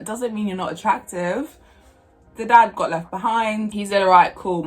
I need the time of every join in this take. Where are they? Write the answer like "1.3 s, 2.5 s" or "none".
2.2 s, 3.8 s

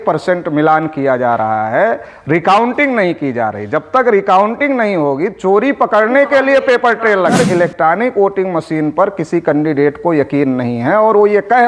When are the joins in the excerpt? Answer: 7.2 s

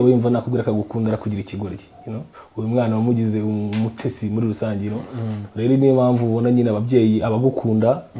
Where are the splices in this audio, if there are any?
2.4 s

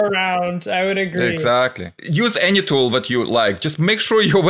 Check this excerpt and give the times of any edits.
none

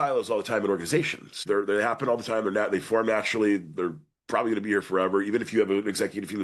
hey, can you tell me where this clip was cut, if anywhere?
1.4 s

